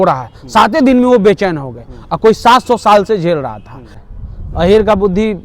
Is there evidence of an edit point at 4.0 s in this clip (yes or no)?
yes